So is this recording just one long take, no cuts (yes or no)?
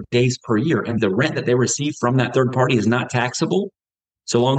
no